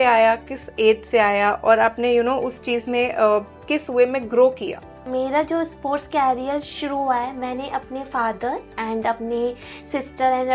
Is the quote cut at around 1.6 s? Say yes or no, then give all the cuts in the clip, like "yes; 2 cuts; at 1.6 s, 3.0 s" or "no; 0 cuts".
no; 0 cuts